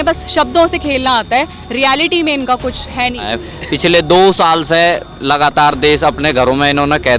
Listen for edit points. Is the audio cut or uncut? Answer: cut